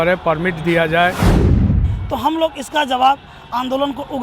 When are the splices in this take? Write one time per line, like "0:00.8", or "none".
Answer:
0:01.7